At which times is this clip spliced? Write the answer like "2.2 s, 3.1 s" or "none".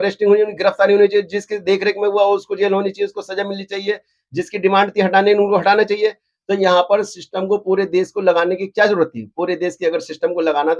none

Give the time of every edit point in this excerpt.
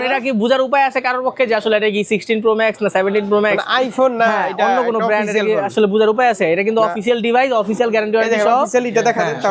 none

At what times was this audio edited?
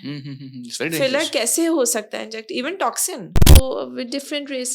3.6 s

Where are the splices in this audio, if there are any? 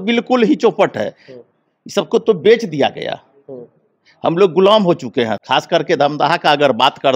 none

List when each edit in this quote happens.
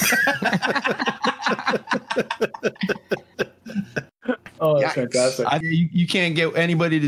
4.1 s, 5.6 s

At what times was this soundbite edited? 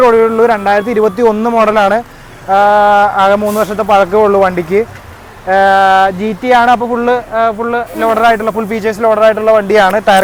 none

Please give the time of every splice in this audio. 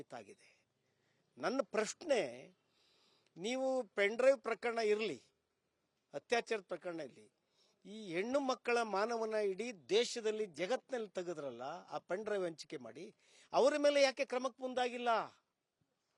13.3 s

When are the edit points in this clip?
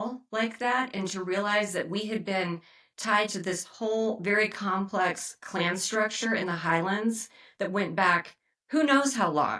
none

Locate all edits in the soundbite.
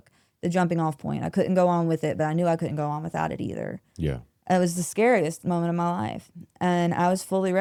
none

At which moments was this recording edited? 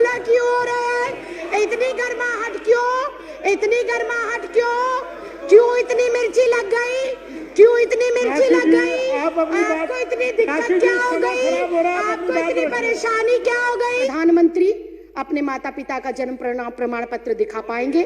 14.1 s

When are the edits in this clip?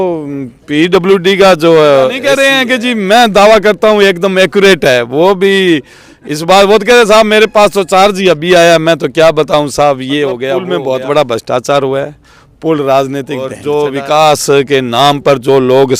2.2 s, 10.7 s, 13.6 s

